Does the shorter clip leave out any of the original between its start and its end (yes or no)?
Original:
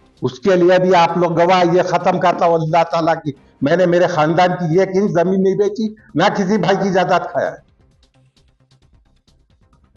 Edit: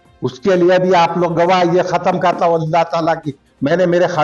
no